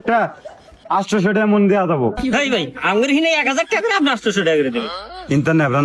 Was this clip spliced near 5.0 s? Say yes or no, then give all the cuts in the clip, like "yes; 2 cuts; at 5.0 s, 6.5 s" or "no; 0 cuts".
yes; 1 cut; at 5.0 s